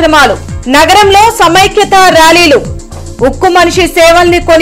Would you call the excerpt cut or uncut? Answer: uncut